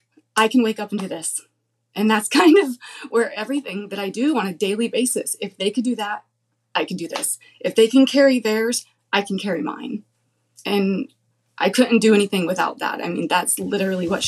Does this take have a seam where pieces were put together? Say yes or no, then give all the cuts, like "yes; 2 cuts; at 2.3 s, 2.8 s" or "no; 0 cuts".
no; 0 cuts